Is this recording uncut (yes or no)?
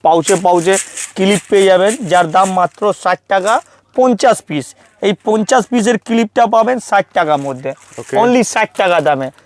yes